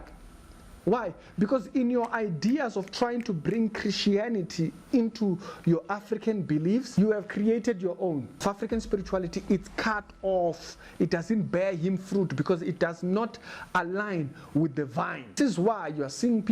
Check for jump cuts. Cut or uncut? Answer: cut